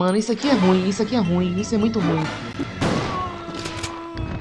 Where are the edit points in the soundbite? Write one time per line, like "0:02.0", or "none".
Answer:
0:02.6